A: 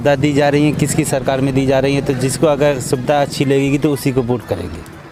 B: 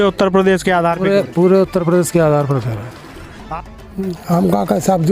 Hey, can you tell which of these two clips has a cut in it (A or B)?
B